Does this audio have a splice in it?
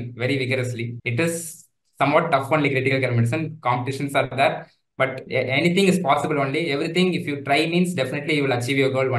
yes; 2 cuts; at 1.0 s, 5.2 s

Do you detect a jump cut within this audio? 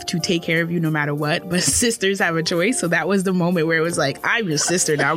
no; 0 cuts

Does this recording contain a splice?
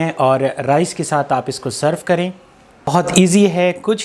yes; 1 cut; at 2.9 s

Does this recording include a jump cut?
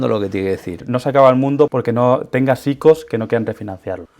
yes; 2 cuts; at 0.8 s, 1.7 s

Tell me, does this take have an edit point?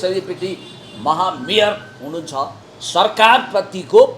yes; 1 cut; at 2.6 s

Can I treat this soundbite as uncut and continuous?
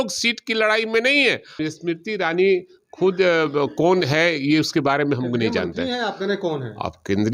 no; 1 cut; at 1.5 s

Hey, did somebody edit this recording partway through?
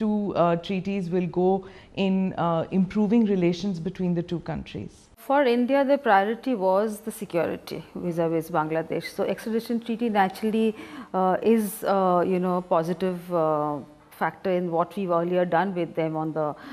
no; 0 cuts

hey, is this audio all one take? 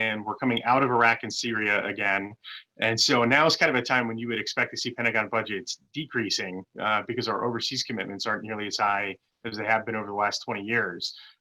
yes; 0 cuts

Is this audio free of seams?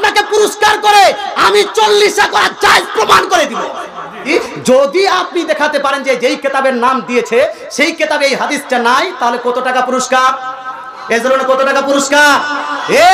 no; 1 cut; at 4.2 s

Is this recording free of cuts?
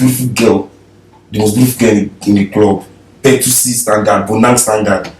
yes; 0 cuts

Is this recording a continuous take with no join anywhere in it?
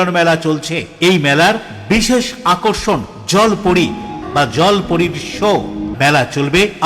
no; 2 cuts; at 4.2 s, 5.9 s

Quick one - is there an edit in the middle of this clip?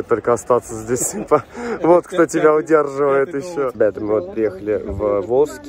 yes; 1 cut; at 3.7 s

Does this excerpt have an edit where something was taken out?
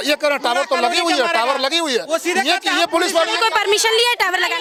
no; 0 cuts

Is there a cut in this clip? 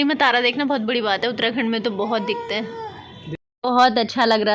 no; 0 cuts

